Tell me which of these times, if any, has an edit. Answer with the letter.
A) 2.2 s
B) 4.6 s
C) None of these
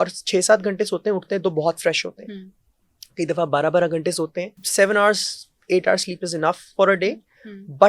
B